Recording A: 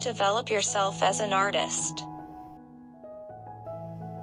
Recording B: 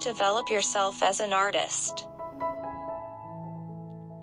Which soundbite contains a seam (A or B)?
A